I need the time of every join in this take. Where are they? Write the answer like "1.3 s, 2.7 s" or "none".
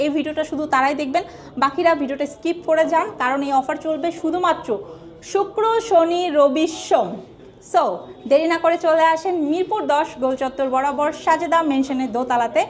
none